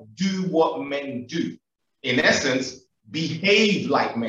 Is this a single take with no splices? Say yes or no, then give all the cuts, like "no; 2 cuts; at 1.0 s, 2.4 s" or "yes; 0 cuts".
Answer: yes; 0 cuts